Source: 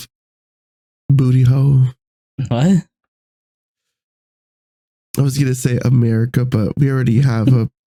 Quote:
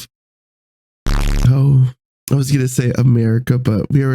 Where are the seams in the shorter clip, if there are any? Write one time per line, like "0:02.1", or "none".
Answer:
0:02.1